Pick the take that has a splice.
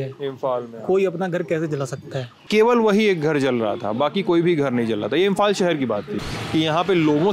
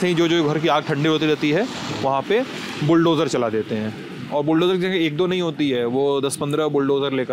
first; 2 cuts; at 2.4 s, 6.2 s

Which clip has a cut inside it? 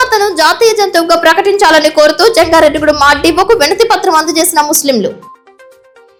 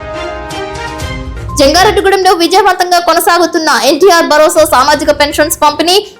second; 1 cut; at 1.6 s

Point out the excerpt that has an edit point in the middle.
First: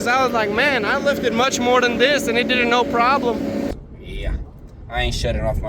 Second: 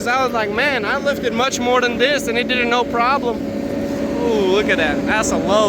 first; 1 cut; at 3.7 s

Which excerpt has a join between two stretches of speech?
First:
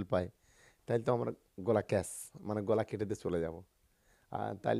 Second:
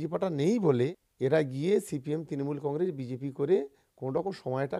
second; 1 cut; at 1.0 s

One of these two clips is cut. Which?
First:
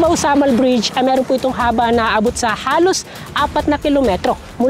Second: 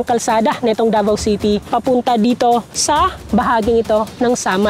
second; 2 cuts; at 1.7 s, 3.0 s

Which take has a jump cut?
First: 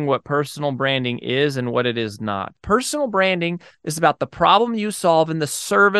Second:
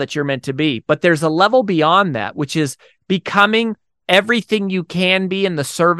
first; 1 cut; at 2.6 s

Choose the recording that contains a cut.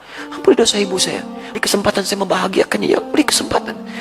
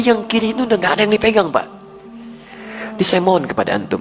first; 1 cut; at 1.6 s

